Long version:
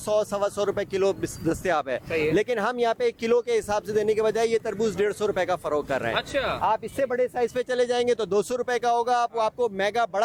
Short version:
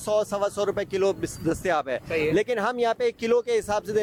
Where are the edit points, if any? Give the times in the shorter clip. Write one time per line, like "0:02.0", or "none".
none